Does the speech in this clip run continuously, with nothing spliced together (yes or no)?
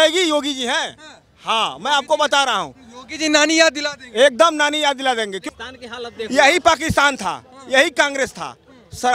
no